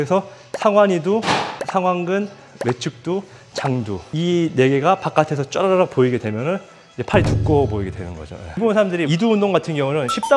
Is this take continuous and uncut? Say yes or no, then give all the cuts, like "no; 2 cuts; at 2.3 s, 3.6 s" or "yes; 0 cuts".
no; 2 cuts; at 4.1 s, 8.6 s